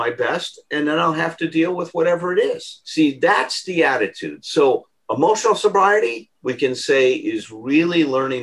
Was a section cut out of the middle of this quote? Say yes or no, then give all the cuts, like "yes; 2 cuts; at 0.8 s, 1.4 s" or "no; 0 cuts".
no; 0 cuts